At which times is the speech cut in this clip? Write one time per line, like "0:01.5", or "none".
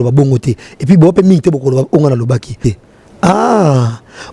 0:02.7